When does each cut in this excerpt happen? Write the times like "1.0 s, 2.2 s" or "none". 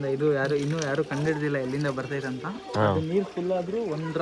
none